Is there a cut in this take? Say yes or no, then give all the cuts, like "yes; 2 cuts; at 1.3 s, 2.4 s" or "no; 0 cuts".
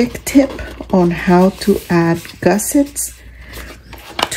no; 0 cuts